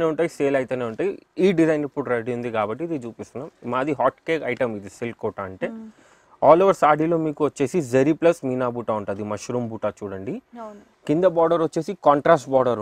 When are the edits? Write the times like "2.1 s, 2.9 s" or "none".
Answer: none